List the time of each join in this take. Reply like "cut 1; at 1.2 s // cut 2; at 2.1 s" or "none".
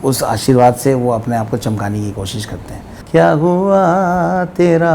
cut 1; at 2.9 s